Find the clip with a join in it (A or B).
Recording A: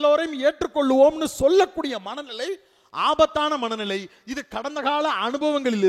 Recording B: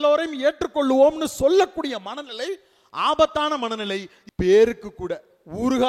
B